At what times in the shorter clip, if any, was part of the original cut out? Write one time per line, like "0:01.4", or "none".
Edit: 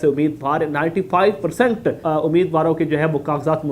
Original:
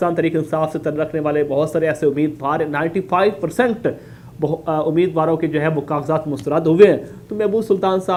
0:02.0